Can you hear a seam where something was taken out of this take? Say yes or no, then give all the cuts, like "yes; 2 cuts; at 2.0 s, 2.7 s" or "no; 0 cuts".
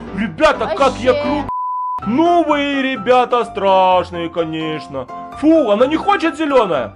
yes; 1 cut; at 1.4 s